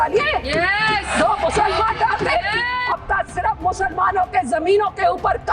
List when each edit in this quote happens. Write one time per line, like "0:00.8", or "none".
0:02.9